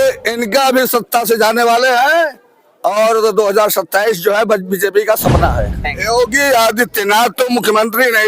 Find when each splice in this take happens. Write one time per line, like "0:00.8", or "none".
0:05.9